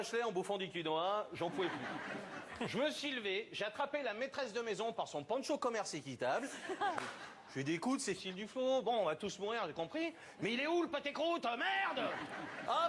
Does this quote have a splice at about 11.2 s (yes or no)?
yes